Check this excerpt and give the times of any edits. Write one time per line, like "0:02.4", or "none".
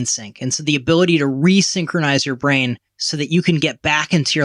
0:02.9